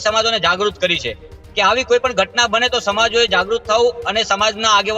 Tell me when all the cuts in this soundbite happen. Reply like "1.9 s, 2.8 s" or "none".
none